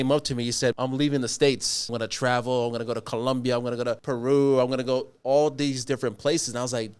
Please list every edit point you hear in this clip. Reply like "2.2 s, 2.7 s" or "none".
0.7 s, 1.9 s, 4.0 s